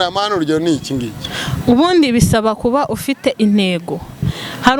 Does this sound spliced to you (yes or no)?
no